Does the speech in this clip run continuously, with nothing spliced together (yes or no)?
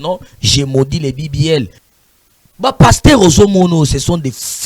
no